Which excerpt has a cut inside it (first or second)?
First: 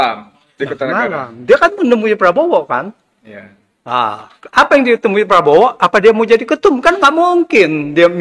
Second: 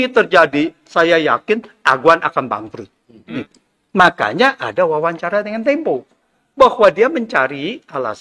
second